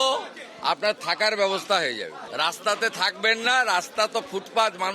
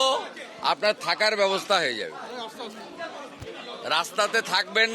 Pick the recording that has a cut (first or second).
first